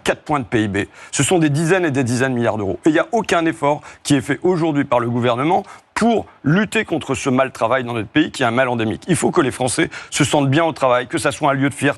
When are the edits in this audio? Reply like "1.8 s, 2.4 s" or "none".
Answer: none

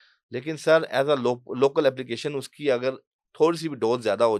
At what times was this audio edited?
none

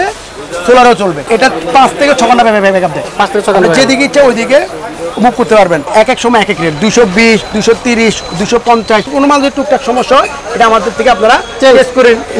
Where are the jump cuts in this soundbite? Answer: 1.2 s, 5.9 s, 9.1 s

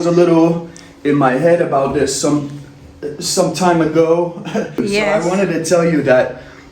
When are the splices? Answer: 4.7 s

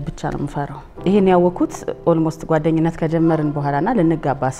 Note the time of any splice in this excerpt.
1.0 s

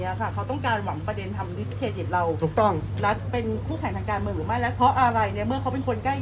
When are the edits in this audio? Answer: none

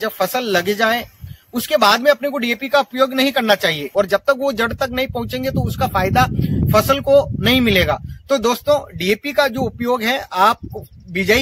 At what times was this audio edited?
3.8 s

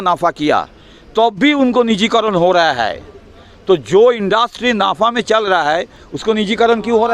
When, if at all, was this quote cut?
6.0 s

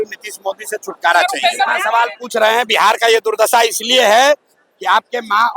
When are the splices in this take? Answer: 1.8 s

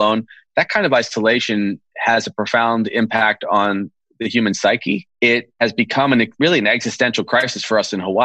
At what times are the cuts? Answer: 5.4 s, 6.3 s

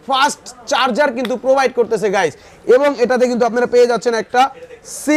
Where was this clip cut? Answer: none

